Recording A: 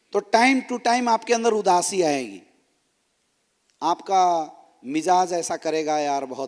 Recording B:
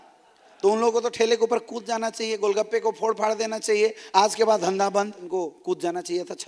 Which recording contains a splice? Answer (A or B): B